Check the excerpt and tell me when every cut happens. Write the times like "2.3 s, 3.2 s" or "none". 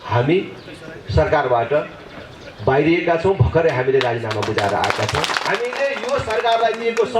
5.4 s